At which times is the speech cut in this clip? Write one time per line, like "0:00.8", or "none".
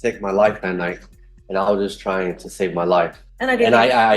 0:03.2